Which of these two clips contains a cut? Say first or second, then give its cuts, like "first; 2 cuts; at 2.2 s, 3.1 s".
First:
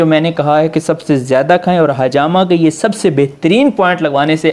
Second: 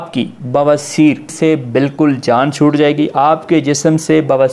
second; 1 cut; at 1.3 s